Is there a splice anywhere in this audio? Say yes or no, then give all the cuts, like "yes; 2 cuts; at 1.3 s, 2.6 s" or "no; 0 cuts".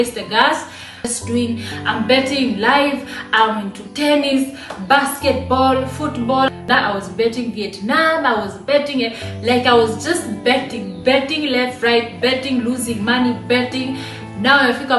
yes; 2 cuts; at 1.2 s, 6.6 s